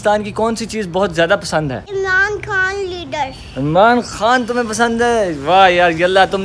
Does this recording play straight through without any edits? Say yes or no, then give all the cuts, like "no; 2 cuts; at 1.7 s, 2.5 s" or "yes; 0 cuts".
yes; 0 cuts